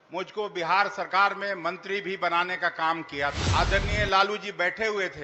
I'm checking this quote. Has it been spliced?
yes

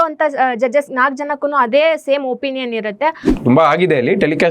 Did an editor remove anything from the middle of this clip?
yes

